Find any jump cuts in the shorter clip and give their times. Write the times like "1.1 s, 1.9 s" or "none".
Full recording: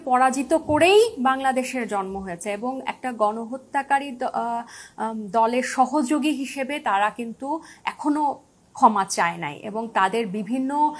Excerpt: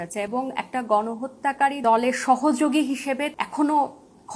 1.8 s, 3.3 s